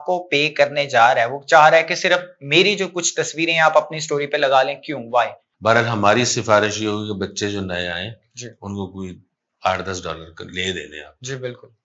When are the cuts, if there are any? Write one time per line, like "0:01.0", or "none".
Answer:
0:05.4

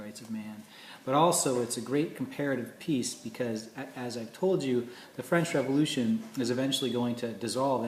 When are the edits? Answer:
0:06.3

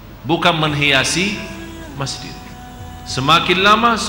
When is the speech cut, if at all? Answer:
0:02.5

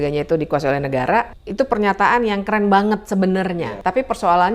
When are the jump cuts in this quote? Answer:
0:01.4
0:03.5

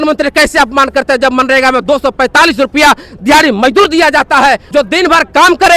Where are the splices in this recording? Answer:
0:04.6

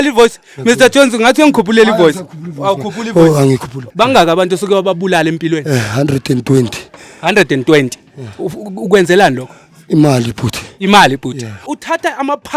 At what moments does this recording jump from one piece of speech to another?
0:03.8
0:11.6

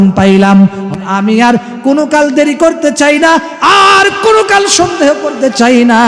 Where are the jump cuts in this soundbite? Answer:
0:01.1

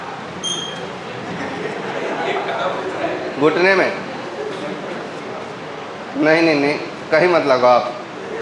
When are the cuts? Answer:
0:04.5

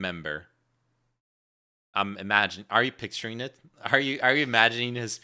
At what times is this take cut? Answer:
none

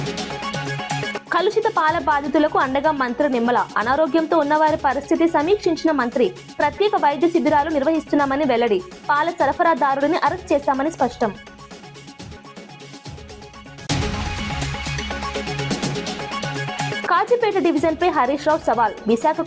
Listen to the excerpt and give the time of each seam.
0:01.1

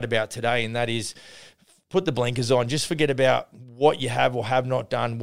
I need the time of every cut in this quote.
none

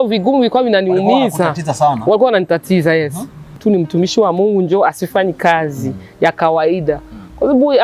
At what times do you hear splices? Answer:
0:03.6

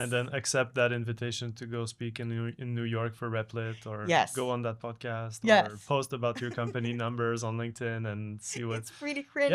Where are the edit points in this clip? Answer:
none

